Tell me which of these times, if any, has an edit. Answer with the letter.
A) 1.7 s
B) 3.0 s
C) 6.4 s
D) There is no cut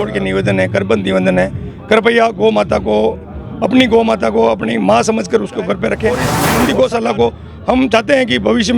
C